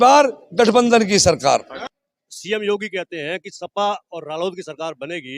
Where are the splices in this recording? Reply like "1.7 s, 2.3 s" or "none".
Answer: 1.7 s